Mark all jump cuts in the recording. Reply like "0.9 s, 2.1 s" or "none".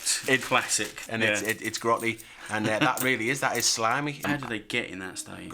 1.0 s, 4.2 s